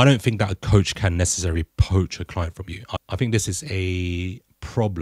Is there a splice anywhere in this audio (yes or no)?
yes